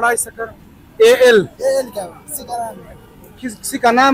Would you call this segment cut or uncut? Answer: uncut